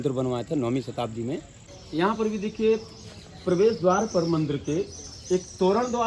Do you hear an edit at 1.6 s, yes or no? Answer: yes